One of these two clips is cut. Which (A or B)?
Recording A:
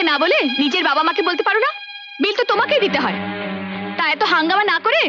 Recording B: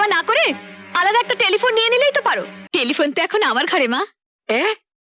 B